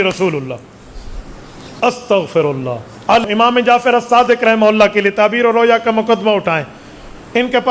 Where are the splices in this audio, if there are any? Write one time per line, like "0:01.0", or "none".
0:03.2